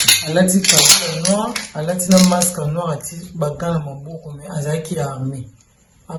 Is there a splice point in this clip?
no; 0 cuts

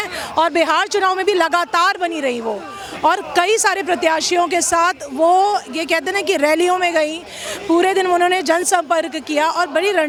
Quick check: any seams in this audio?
no; 0 cuts

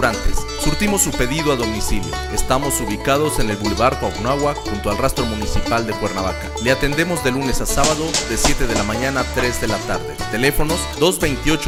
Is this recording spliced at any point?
no; 0 cuts

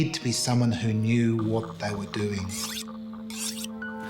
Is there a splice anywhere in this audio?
no; 0 cuts

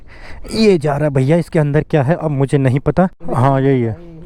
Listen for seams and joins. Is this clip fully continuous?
no; 1 cut; at 3.2 s

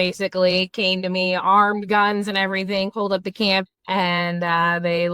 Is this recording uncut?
no; 1 cut; at 3.7 s

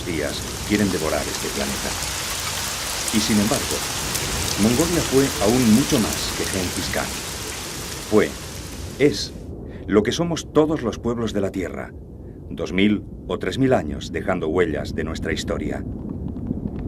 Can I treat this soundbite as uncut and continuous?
yes; 0 cuts

